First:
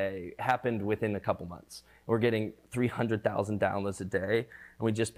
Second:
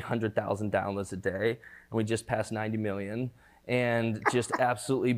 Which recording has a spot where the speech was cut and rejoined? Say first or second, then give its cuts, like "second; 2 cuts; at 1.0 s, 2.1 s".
first; 1 cut; at 1.9 s